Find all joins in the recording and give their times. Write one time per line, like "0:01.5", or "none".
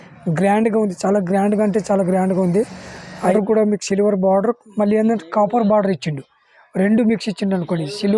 0:03.3